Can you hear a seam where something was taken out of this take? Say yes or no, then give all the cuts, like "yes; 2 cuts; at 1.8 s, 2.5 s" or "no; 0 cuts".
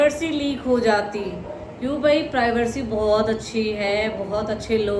no; 0 cuts